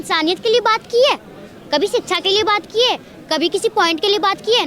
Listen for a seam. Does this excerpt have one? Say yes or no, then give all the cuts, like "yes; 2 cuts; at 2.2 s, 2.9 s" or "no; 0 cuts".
no; 0 cuts